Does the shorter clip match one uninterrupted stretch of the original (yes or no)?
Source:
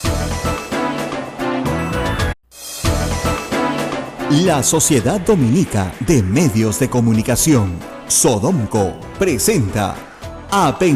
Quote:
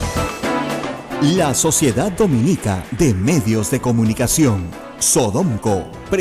no